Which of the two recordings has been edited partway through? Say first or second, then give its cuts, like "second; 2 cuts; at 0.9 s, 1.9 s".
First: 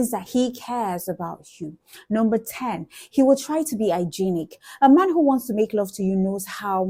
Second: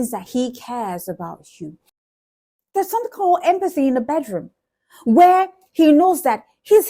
second; 1 cut; at 1.9 s